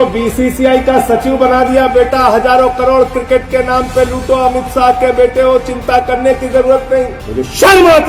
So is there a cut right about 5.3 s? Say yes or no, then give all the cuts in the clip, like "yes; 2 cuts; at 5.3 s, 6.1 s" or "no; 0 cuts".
no; 1 cut; at 7.2 s